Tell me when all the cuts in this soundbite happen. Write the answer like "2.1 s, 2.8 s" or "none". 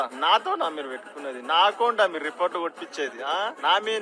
none